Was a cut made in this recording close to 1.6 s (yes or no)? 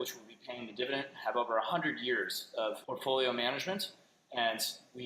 no